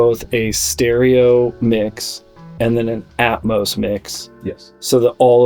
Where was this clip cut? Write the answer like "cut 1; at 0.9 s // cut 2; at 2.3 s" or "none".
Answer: none

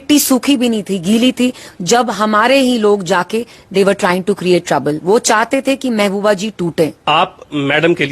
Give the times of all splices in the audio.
cut 1; at 7.0 s

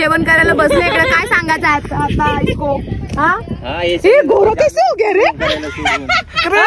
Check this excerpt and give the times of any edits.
none

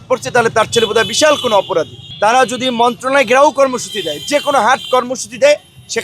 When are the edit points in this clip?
cut 1; at 2.0 s

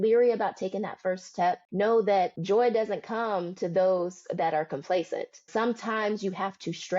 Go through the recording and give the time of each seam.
cut 1; at 1.6 s // cut 2; at 2.4 s // cut 3; at 5.5 s

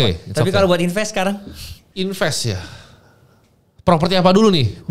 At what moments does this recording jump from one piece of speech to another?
none

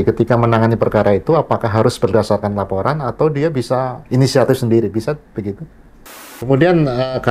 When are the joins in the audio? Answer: cut 1; at 4.0 s // cut 2; at 6.3 s

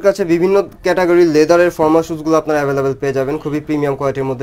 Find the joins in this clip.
none

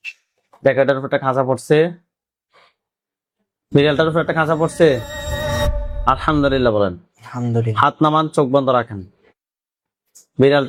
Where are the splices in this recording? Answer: none

